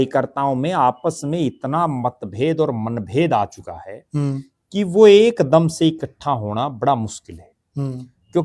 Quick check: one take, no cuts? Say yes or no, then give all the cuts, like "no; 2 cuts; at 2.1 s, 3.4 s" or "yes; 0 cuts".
yes; 0 cuts